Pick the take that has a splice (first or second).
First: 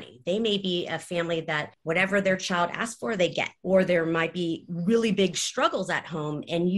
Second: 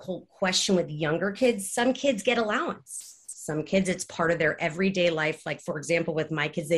first